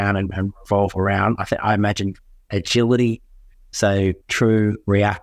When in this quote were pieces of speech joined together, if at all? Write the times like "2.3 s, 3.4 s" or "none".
none